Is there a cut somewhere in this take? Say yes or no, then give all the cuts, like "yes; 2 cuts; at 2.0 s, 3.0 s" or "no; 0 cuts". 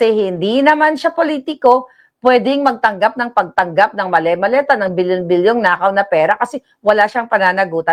no; 0 cuts